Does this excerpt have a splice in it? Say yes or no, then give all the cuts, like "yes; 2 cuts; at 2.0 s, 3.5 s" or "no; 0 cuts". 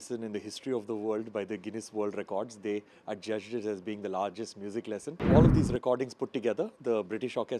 yes; 1 cut; at 5.3 s